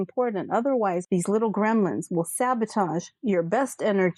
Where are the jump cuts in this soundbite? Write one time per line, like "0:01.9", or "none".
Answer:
0:01.1